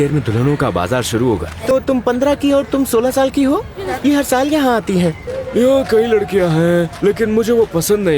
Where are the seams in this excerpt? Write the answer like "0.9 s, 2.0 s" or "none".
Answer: 1.7 s, 3.8 s, 5.3 s